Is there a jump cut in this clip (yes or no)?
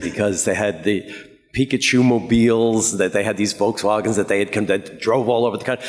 no